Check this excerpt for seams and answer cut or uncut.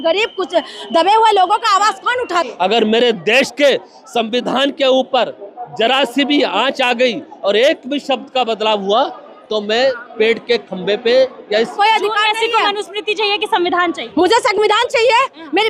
cut